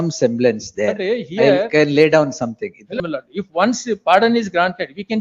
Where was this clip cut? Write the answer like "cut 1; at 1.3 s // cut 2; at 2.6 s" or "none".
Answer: cut 1; at 3.0 s